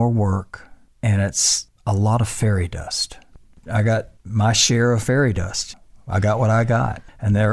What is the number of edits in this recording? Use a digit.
1